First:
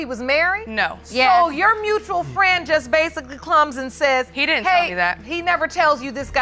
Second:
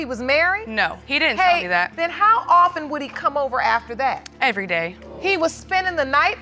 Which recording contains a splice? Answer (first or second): second